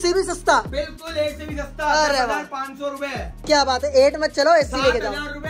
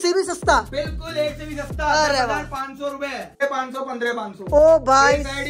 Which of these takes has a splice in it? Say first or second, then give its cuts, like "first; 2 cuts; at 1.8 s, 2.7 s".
second; 1 cut; at 3.2 s